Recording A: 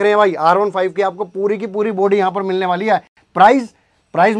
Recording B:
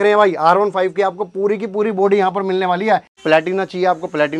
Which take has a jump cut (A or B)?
B